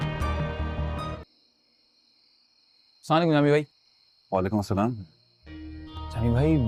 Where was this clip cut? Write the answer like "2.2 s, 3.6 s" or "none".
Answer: none